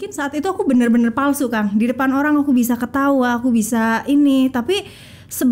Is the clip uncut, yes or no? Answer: yes